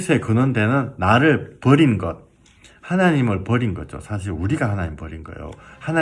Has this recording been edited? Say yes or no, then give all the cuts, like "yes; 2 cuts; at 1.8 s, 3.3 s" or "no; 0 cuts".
no; 0 cuts